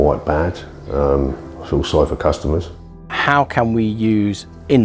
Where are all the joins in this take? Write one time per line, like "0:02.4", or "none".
0:03.2